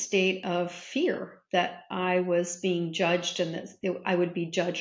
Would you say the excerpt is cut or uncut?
uncut